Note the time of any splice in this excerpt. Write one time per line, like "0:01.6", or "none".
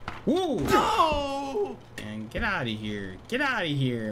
0:02.0